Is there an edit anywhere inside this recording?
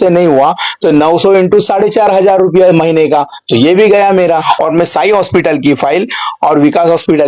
yes; 1 cut; at 4.4 s

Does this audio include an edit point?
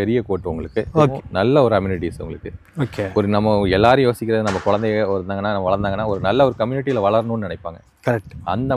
yes; 1 cut; at 1.1 s

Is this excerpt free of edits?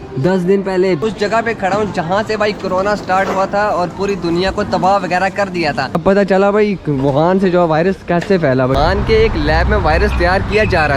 no; 3 cuts; at 1.0 s, 6.0 s, 8.7 s

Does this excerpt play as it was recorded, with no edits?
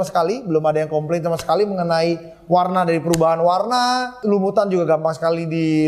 no; 1 cut; at 4.1 s

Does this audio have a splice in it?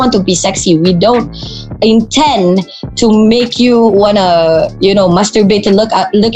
no; 0 cuts

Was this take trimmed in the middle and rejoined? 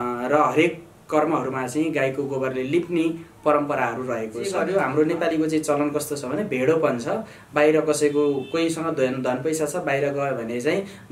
yes; 1 cut; at 4.6 s

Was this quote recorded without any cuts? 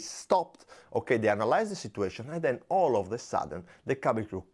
yes; 0 cuts

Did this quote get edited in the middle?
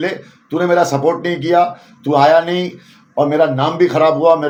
no; 0 cuts

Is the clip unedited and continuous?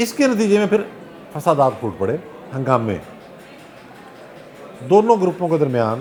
yes; 0 cuts

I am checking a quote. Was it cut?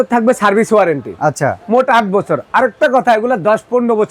no; 0 cuts

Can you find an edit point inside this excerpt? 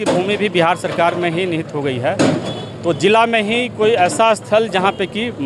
no; 0 cuts

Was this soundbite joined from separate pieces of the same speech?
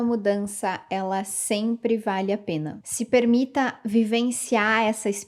no; 0 cuts

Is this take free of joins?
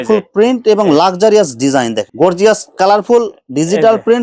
no; 1 cut; at 2.0 s

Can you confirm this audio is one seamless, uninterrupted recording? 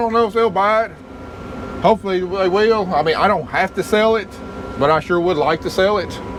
yes; 0 cuts

